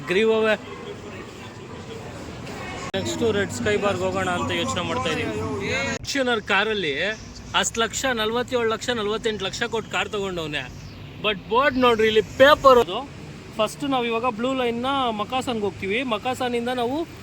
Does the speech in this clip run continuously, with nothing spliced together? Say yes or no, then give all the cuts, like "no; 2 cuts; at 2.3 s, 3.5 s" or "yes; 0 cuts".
no; 3 cuts; at 2.9 s, 6.1 s, 12.8 s